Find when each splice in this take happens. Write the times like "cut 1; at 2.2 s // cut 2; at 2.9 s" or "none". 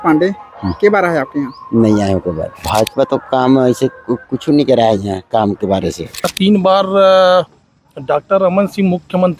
cut 1; at 2.6 s // cut 2; at 6.3 s